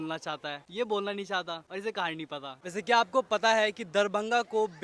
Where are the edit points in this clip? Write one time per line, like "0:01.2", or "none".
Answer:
0:02.6